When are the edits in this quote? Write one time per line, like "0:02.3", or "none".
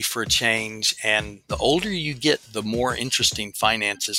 0:01.4